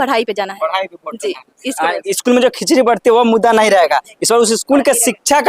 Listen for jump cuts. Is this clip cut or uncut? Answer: uncut